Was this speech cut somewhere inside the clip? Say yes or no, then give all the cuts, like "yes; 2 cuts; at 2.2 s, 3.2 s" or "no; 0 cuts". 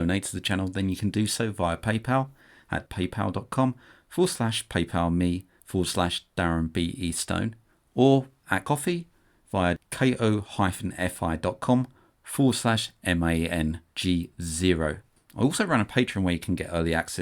yes; 2 cuts; at 5.5 s, 8.6 s